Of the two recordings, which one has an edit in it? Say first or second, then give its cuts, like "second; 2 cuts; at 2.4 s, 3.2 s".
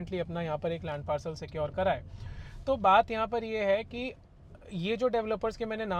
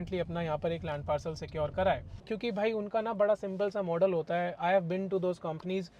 second; 1 cut; at 2.3 s